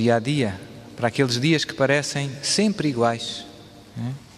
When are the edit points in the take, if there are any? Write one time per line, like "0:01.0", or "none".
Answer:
0:01.0